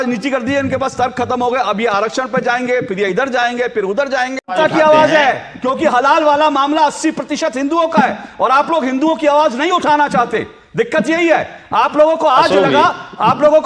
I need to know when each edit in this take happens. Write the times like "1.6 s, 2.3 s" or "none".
4.5 s